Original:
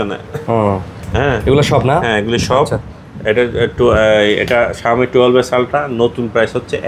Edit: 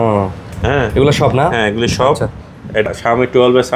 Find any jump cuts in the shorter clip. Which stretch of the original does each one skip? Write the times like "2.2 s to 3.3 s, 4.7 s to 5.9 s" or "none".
3.4 s to 4.6 s